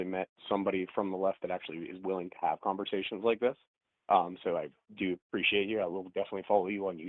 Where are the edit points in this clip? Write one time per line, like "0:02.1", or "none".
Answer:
none